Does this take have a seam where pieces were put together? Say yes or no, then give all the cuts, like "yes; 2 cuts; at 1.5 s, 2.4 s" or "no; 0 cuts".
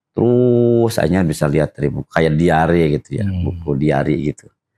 no; 0 cuts